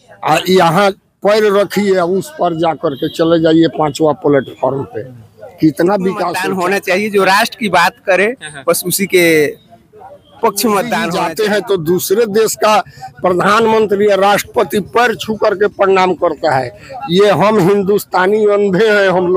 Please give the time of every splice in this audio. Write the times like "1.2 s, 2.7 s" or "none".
6.4 s, 11.1 s